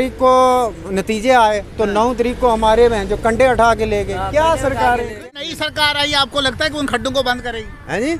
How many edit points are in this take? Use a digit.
1